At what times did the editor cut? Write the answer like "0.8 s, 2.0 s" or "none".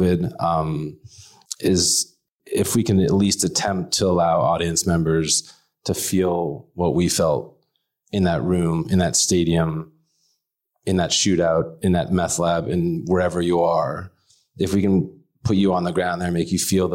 2.3 s